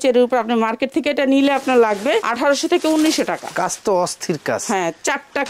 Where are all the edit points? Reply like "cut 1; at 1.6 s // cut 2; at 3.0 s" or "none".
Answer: none